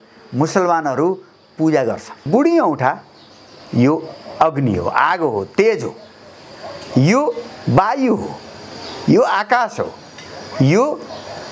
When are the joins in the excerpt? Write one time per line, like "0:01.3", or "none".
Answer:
0:02.2